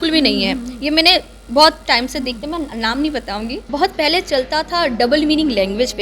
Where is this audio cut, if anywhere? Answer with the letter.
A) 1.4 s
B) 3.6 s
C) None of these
B